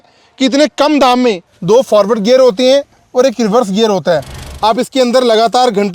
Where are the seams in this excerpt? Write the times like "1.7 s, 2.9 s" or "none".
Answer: 1.5 s, 4.4 s